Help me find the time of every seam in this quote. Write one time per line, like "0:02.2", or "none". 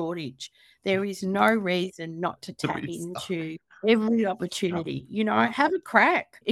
none